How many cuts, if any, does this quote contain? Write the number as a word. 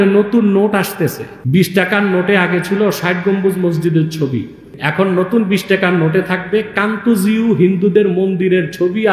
two